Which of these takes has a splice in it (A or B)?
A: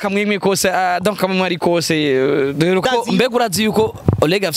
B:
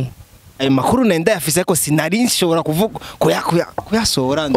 A